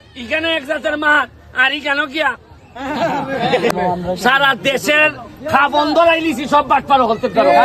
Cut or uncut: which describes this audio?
cut